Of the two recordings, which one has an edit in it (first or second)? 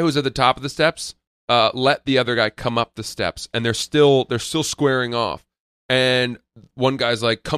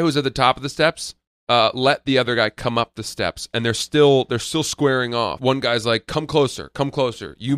second